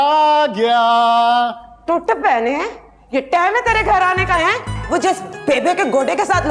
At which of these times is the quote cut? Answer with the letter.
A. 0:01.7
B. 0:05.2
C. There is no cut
C